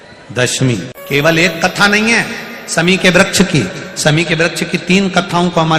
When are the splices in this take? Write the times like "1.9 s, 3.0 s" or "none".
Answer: 1.0 s